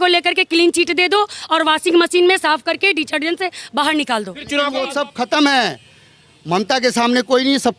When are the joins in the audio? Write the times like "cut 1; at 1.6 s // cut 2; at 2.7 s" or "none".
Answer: cut 1; at 4.9 s